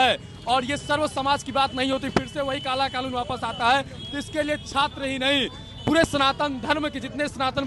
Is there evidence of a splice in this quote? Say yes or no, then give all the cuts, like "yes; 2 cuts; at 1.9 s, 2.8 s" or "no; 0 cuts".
no; 0 cuts